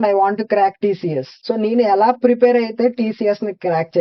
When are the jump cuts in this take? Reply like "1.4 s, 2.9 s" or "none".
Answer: none